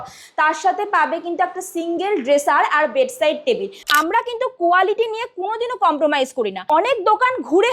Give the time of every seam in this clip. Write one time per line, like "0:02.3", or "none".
0:03.8
0:06.6

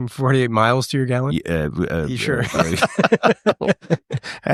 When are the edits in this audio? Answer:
none

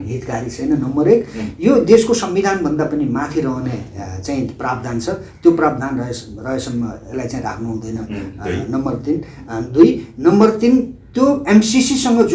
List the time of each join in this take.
none

